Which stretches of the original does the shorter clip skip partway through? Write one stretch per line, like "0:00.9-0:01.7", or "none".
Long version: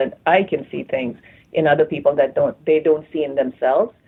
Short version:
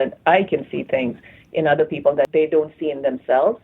0:02.3-0:02.6

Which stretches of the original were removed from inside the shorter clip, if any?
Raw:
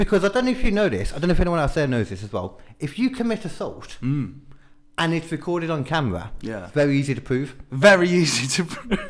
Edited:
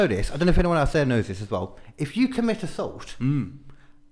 none

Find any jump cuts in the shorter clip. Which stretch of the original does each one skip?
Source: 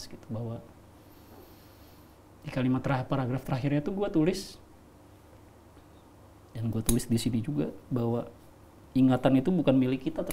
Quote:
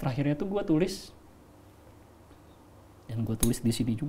none

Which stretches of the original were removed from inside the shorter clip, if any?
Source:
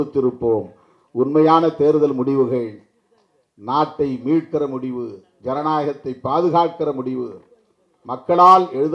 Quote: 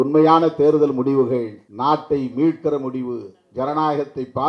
0:02.8-0:03.5

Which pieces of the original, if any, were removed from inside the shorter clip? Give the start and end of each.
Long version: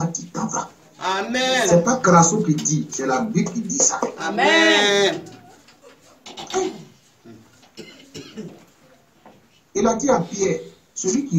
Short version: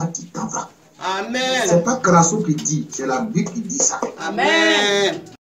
none

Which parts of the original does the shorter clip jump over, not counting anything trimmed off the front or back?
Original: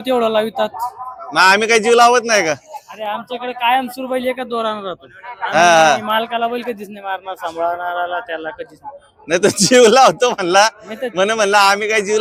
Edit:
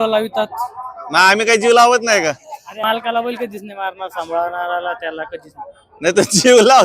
0:03.0-0:06.1

